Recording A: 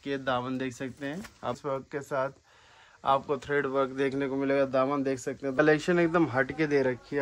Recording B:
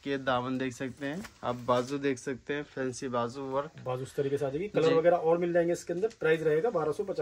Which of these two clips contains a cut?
A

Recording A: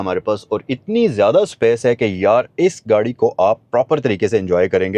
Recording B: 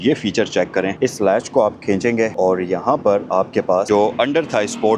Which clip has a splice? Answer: B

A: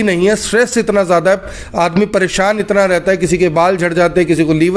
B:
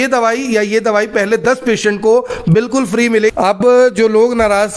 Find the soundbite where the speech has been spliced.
B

